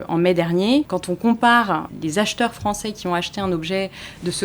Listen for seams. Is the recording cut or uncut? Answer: cut